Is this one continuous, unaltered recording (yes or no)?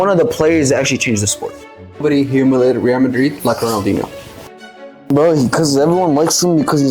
no